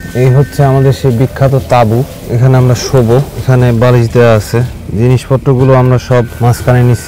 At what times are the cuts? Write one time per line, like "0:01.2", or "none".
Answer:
none

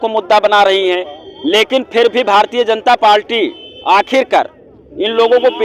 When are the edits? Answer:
none

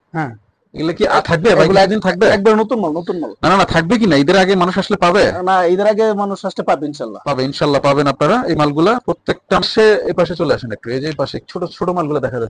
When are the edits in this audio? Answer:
none

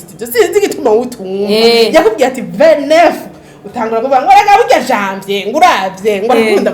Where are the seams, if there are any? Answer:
none

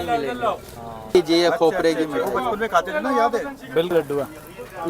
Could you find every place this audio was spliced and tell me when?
0:01.1
0:03.9

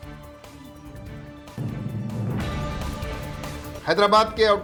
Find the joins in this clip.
none

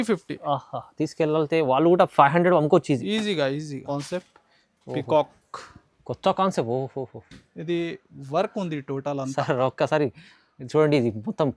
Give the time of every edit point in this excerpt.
0:03.8

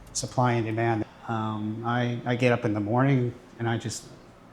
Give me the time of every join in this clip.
0:01.0

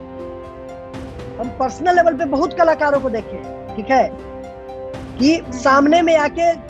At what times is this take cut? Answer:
0:01.4

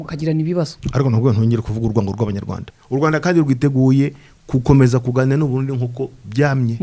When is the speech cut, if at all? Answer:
0:02.5

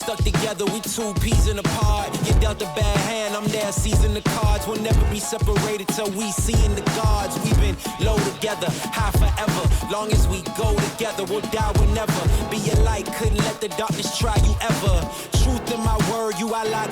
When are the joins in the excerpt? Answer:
none

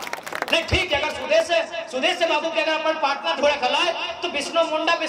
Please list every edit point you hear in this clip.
none

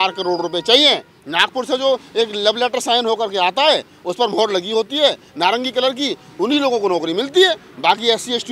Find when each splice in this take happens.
0:01.2

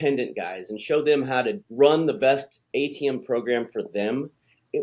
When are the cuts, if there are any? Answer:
0:01.6
0:02.6

